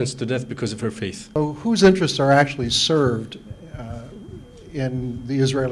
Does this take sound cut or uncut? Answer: cut